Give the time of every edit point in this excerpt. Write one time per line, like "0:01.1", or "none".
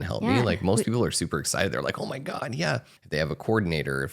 0:03.0